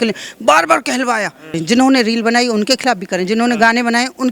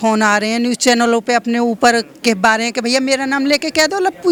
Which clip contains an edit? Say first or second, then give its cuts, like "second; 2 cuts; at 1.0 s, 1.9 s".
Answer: first; 1 cut; at 1.5 s